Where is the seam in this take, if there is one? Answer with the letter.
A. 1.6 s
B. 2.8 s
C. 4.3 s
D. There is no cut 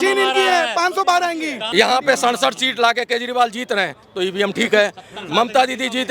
A